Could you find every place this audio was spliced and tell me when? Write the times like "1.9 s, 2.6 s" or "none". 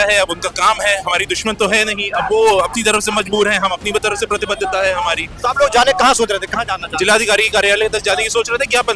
none